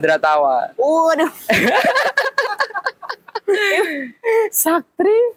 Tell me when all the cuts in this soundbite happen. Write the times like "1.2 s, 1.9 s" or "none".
none